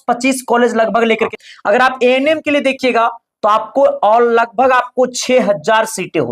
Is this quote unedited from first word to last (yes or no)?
no